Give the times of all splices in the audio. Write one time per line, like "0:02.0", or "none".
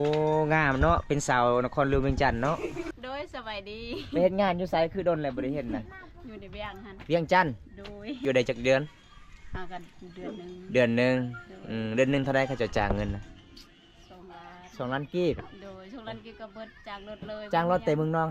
0:02.9
0:08.2